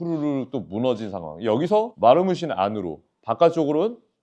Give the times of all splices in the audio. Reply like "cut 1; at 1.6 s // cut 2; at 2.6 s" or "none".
cut 1; at 1.9 s